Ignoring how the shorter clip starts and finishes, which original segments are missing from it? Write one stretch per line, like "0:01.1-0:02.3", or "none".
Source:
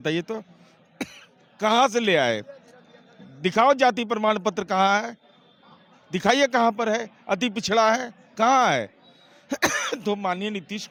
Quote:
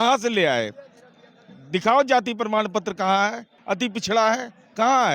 0:05.2-0:07.1